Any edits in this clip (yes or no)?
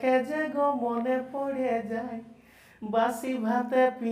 no